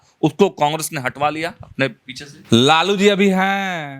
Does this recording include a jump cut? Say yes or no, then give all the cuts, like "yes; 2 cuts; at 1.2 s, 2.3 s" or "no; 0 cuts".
yes; 1 cut; at 2.4 s